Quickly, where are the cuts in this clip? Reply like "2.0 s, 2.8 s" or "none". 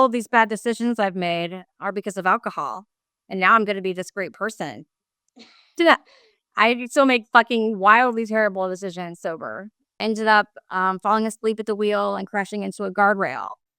10.0 s